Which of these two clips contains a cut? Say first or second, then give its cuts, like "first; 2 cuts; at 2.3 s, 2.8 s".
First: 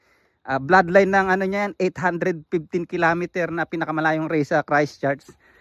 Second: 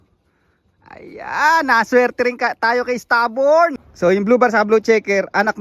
second; 1 cut; at 3.9 s